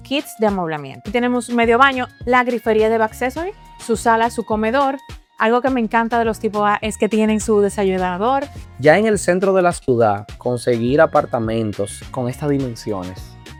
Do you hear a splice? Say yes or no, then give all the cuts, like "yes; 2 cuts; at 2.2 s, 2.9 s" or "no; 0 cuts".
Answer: no; 0 cuts